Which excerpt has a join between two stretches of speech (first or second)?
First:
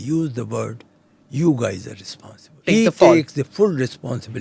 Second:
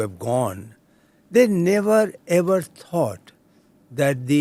first